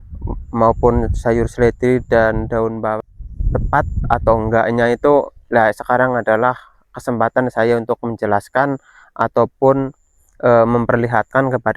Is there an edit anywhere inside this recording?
yes; 1 cut; at 3.0 s

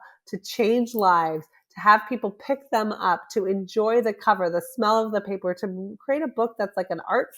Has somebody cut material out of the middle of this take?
no; 0 cuts

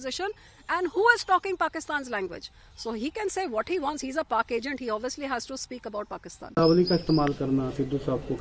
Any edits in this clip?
yes; 1 cut; at 6.6 s

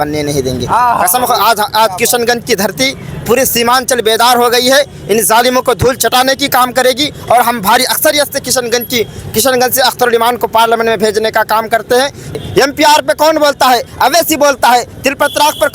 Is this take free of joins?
no; 1 cut; at 12.4 s

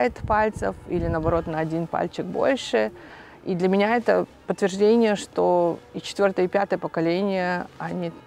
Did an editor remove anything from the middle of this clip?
no; 0 cuts

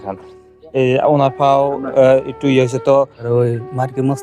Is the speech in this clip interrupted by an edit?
yes; 1 cut; at 3.2 s

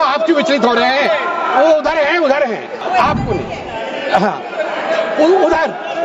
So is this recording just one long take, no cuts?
no; 1 cut; at 2.8 s

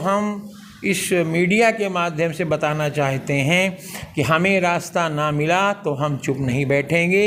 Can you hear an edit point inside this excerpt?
no; 0 cuts

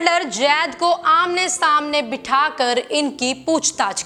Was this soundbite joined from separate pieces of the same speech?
no; 0 cuts

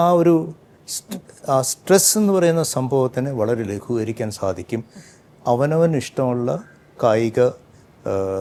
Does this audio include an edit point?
no; 0 cuts

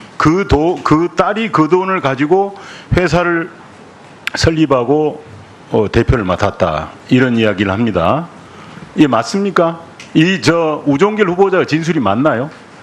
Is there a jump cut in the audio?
yes; 1 cut; at 6.2 s

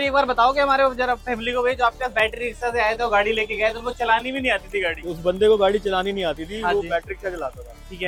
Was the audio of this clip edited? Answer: no; 0 cuts

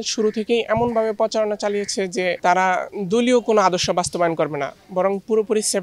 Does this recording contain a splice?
no; 0 cuts

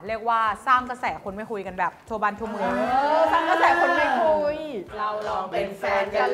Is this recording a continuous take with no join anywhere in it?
no; 1 cut; at 4.9 s

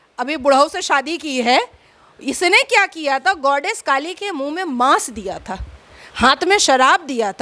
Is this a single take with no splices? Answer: yes; 0 cuts

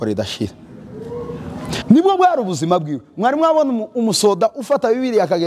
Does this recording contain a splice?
yes; 1 cut; at 1.8 s

